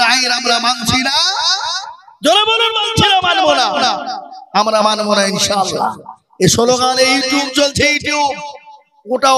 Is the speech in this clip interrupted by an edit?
no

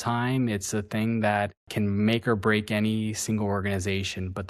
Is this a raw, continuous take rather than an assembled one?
no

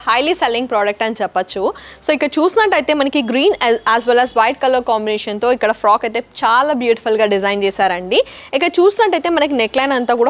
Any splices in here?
no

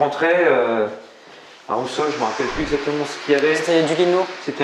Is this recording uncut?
yes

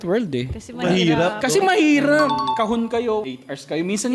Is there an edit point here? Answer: no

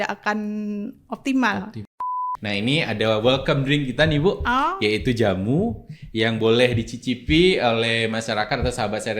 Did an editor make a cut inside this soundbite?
yes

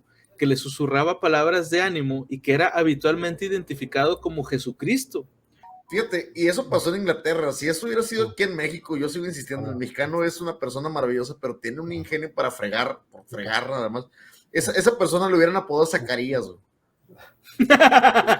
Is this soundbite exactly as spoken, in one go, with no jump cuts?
no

